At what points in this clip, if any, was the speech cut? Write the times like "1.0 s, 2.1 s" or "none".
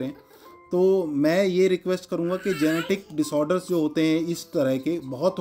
none